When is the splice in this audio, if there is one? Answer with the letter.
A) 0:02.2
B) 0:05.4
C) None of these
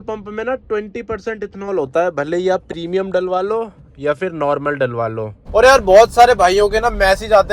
B